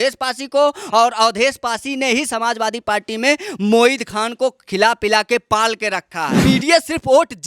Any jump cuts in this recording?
yes; 1 cut; at 6.4 s

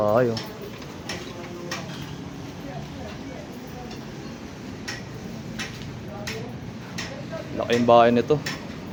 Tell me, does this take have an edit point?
no; 0 cuts

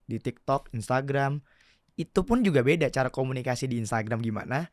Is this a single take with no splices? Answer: yes; 0 cuts

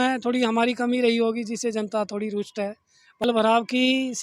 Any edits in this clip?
yes; 1 cut; at 3.2 s

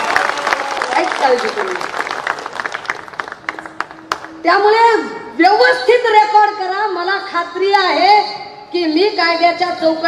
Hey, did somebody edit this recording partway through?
no; 0 cuts

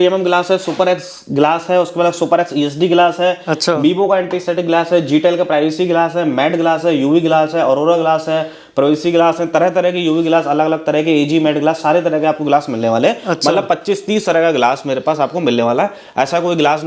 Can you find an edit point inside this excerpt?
no; 0 cuts

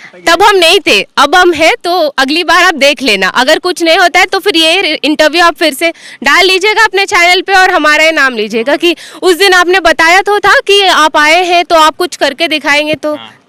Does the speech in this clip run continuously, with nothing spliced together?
yes; 0 cuts

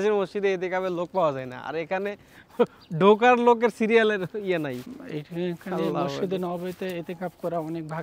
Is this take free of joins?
yes; 0 cuts

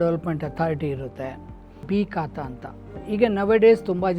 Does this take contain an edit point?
yes; 1 cut; at 1.8 s

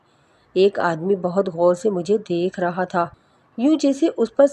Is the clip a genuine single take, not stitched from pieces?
yes; 0 cuts

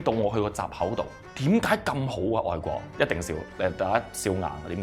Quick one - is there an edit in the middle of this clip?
yes; 2 cuts; at 1.2 s, 2.9 s

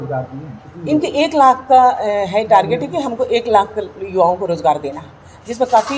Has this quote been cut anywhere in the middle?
no; 0 cuts

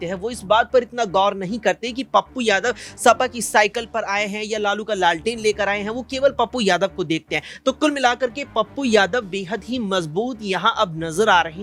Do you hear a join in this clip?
no; 0 cuts

